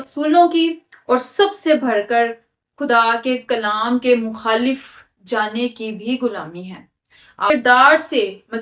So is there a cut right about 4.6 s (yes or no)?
no